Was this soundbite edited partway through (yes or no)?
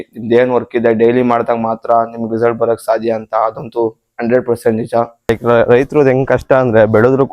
yes